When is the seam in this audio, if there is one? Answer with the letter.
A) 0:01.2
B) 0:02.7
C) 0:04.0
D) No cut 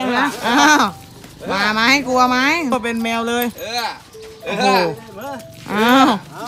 B